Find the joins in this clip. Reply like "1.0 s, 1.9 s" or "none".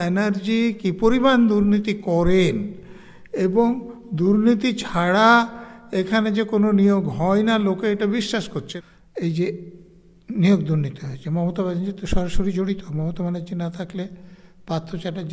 8.6 s